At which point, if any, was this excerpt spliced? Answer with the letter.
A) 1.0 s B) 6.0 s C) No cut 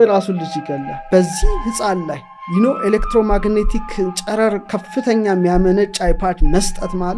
A